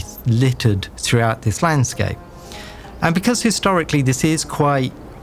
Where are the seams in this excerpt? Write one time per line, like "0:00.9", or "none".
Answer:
0:00.9